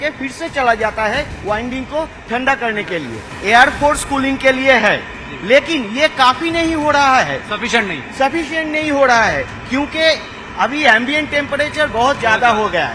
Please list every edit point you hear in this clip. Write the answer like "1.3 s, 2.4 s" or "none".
3.3 s